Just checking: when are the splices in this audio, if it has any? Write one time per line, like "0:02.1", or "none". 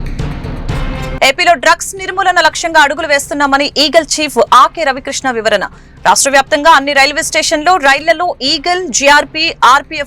0:01.0